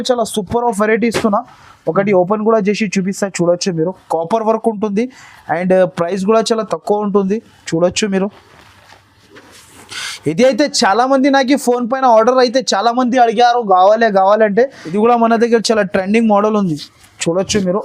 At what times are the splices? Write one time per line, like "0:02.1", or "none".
0:14.8